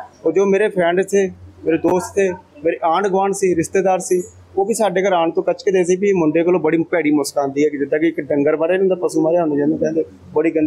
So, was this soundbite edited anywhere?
no; 0 cuts

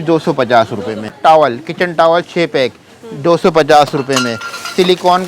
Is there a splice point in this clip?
yes; 1 cut; at 1.1 s

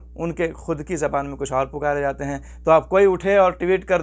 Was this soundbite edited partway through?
no; 0 cuts

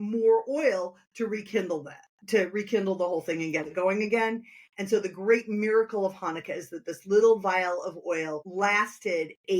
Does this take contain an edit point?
yes; 1 cut; at 8.4 s

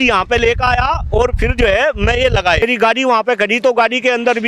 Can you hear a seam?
yes; 1 cut; at 2.6 s

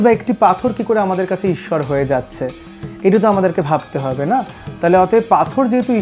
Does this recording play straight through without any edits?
no; 1 cut; at 4.6 s

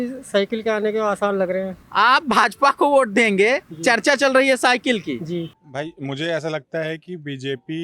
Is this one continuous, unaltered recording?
no; 2 cuts; at 1.8 s, 5.6 s

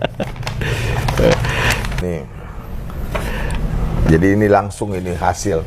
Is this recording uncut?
no; 1 cut; at 2.0 s

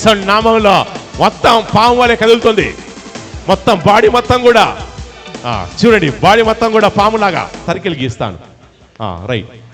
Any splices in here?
yes; 1 cut; at 7.6 s

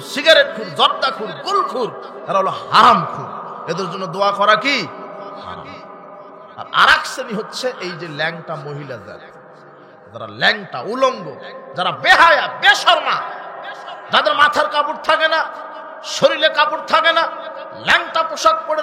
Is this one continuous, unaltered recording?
yes; 0 cuts

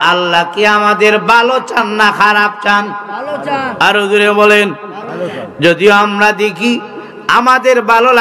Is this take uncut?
yes; 0 cuts

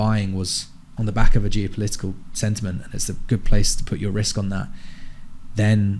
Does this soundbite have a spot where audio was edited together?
no; 0 cuts

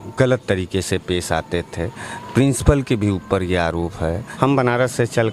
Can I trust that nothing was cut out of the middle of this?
no; 1 cut; at 4.3 s

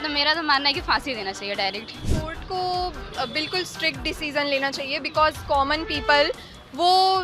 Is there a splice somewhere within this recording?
yes; 1 cut; at 2.0 s

